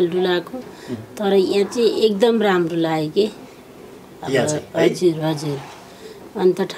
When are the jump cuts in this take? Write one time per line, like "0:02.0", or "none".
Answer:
none